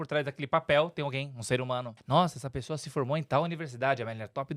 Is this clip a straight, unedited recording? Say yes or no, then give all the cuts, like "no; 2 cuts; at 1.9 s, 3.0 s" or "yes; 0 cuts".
no; 1 cut; at 1.9 s